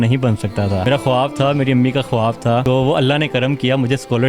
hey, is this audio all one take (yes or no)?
no